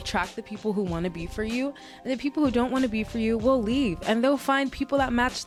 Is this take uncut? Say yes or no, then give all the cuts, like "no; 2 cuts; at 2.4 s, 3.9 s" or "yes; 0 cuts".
yes; 0 cuts